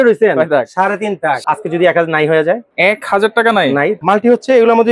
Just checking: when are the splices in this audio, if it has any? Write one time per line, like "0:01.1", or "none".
0:01.4
0:02.7
0:04.0